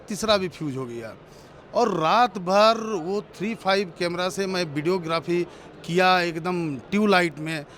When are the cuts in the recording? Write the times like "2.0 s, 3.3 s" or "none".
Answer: none